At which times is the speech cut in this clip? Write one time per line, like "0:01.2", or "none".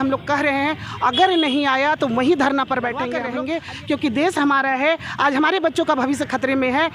0:03.2